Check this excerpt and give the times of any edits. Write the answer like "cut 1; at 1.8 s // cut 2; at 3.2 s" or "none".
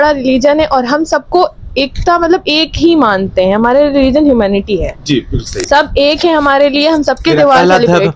none